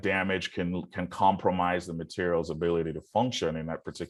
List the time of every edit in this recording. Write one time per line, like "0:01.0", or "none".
none